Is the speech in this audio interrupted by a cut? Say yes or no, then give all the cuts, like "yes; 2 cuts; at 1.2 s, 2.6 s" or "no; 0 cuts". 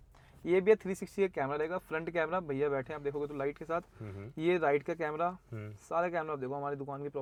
no; 0 cuts